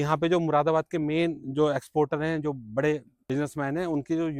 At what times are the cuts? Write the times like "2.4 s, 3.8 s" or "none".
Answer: 3.1 s

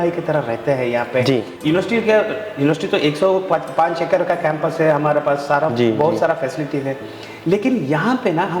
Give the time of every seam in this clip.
1.5 s

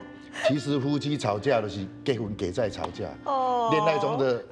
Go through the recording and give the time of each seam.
none

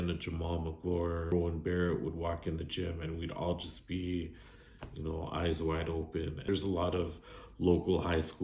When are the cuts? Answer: 1.3 s, 6.4 s

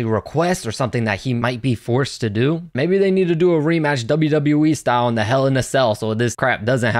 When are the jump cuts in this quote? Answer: 2.7 s

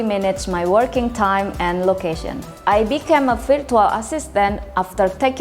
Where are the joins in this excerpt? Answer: 2.5 s

